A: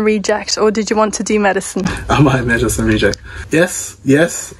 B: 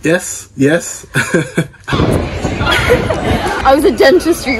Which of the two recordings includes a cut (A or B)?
B